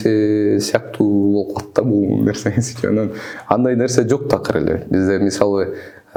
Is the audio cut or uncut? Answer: uncut